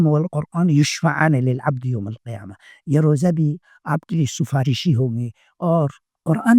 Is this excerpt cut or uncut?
uncut